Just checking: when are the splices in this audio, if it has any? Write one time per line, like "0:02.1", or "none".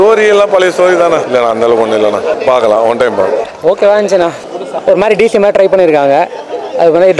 0:01.2
0:02.4
0:04.4